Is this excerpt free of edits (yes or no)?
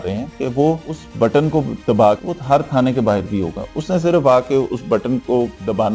yes